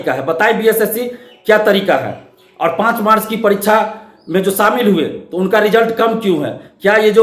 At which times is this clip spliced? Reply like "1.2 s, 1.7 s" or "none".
none